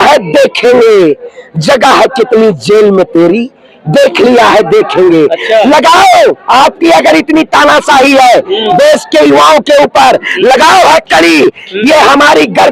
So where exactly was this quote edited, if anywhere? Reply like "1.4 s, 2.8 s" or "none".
none